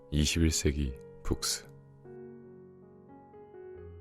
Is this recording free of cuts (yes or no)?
no